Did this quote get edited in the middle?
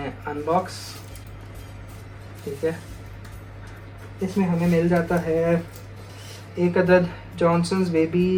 no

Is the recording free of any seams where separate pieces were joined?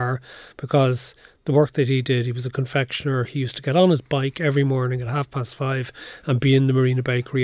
yes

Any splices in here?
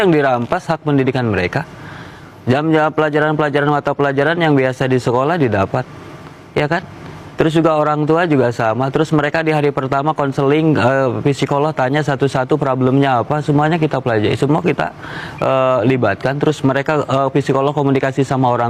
no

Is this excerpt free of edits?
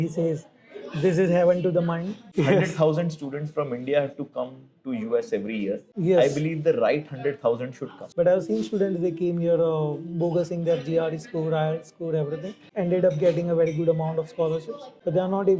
no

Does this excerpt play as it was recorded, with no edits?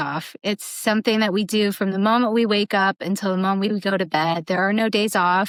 yes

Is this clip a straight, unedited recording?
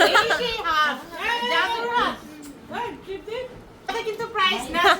no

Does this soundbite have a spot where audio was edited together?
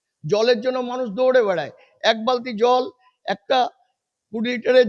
no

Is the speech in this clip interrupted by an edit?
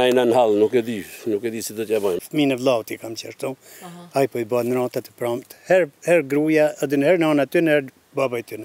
no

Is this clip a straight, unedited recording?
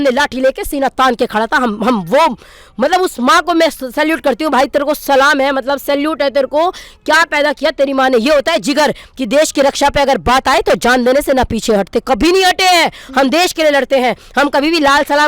yes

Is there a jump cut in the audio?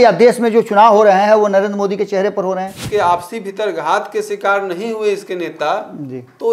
yes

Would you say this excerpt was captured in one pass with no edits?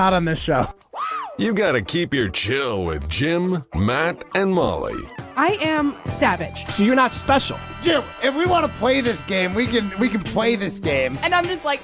yes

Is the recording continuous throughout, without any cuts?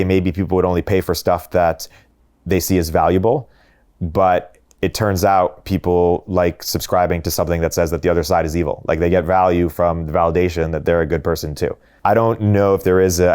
no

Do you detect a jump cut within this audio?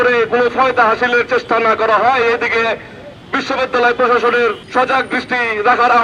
yes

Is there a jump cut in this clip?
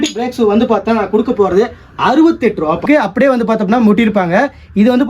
yes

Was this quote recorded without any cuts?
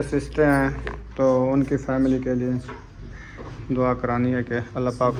yes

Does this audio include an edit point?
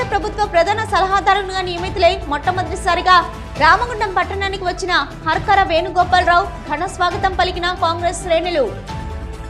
no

